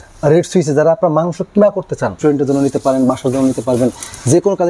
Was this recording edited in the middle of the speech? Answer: yes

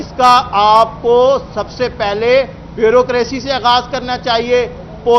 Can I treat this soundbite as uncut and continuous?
yes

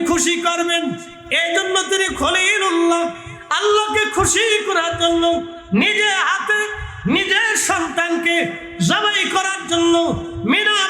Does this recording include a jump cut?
no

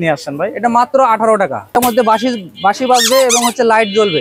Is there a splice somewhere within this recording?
yes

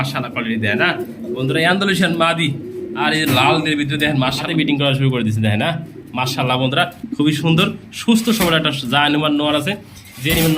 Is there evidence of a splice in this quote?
yes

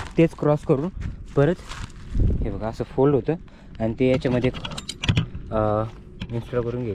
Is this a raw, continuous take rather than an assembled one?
yes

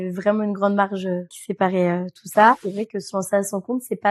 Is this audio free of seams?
no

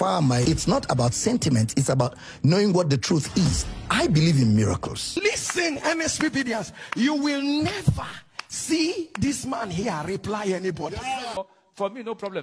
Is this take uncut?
no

